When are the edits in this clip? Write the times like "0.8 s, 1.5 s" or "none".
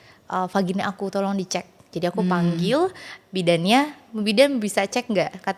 none